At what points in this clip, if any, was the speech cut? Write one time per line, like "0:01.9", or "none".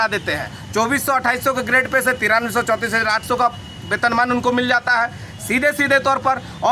none